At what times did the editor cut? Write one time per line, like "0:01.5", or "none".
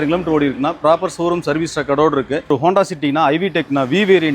0:02.5